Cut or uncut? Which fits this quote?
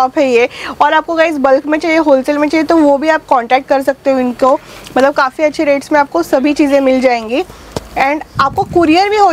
uncut